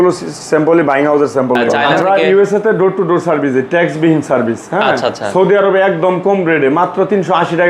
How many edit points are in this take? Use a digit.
1